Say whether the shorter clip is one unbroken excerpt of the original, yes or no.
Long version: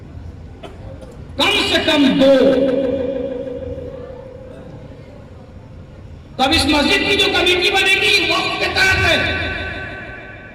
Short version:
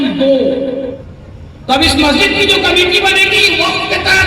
no